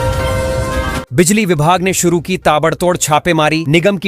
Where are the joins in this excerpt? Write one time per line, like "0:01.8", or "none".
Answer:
0:00.9